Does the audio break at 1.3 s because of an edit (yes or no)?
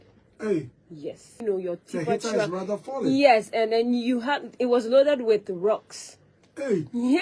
yes